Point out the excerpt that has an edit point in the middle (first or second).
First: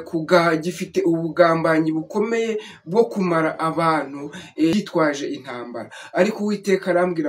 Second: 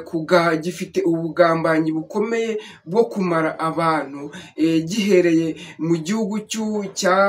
first